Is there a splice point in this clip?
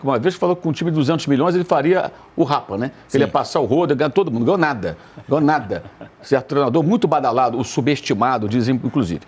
no; 0 cuts

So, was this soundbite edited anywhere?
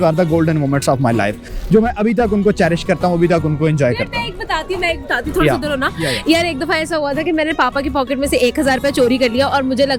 no; 0 cuts

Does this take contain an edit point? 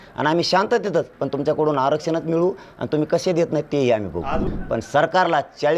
yes; 1 cut; at 4.5 s

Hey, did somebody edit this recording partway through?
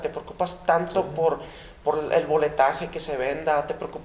no; 0 cuts

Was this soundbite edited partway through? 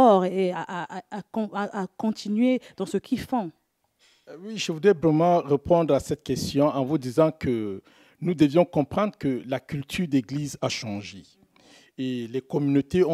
no; 0 cuts

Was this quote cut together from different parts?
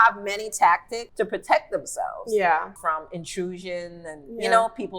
yes; 2 cuts; at 1.0 s, 2.7 s

